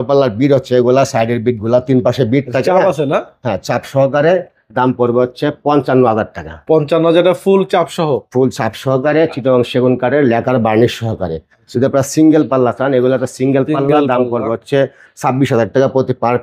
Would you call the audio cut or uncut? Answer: uncut